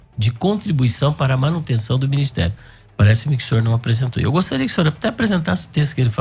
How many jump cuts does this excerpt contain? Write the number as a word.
zero